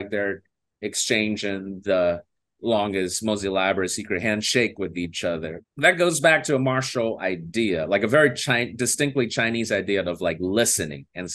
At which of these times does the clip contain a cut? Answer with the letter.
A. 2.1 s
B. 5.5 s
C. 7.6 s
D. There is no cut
B